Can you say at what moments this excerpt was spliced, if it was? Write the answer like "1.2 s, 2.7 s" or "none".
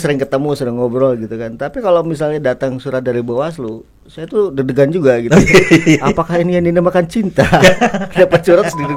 none